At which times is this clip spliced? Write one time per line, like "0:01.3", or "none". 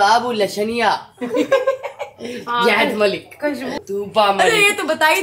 none